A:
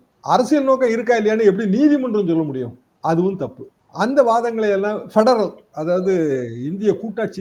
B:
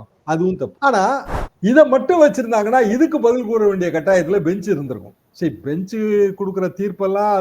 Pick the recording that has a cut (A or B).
B